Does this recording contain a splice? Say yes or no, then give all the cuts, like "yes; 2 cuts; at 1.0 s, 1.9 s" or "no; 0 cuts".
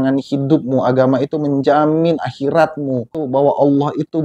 yes; 1 cut; at 3.2 s